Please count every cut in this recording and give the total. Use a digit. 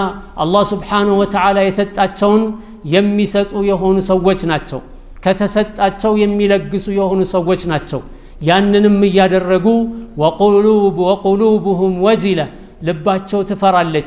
0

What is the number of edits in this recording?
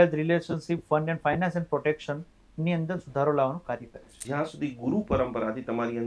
1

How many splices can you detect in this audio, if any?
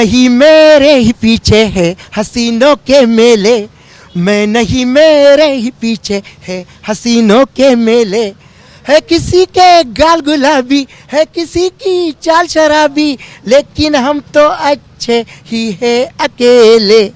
0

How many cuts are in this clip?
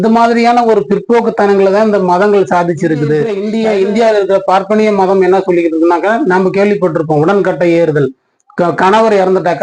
1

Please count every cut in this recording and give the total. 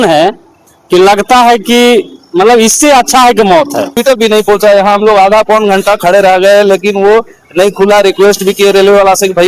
1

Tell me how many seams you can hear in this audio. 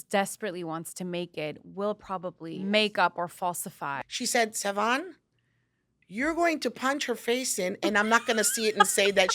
2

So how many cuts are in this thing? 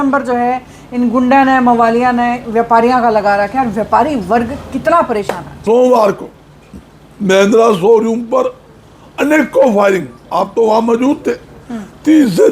1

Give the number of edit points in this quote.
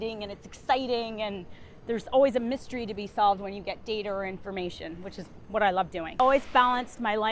1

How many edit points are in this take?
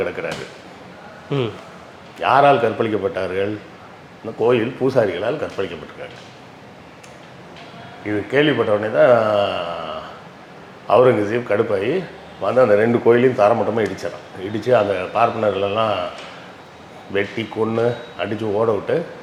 0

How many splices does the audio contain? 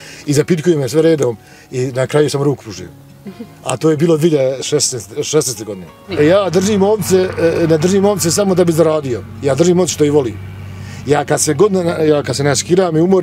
1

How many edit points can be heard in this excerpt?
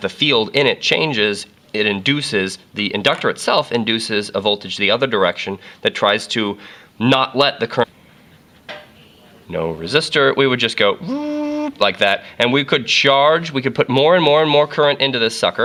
0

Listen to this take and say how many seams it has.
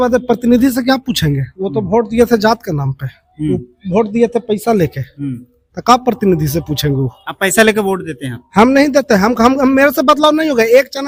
0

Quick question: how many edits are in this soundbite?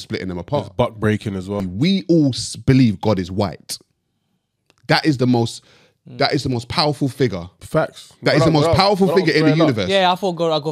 1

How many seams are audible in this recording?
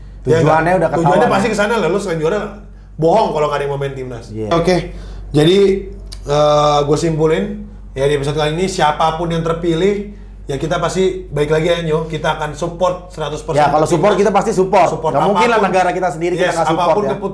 1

